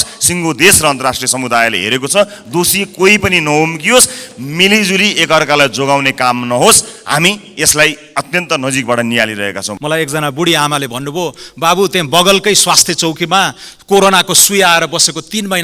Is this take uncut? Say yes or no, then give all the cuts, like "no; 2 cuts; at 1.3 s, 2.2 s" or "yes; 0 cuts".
no; 1 cut; at 9.7 s